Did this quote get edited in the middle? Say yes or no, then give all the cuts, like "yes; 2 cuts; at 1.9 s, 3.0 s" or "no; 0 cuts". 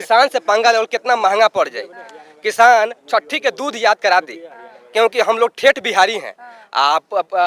no; 0 cuts